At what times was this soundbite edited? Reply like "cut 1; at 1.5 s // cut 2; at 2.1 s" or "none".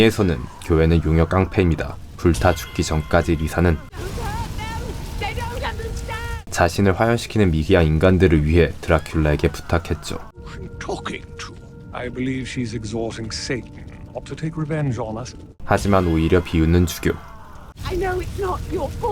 none